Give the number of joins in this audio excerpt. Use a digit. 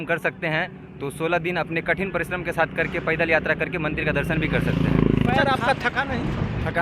1